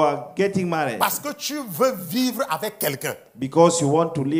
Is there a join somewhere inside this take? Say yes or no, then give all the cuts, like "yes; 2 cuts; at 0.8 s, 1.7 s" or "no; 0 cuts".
no; 0 cuts